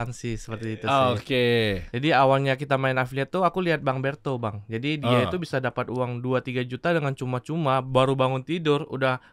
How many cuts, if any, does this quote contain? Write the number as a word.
one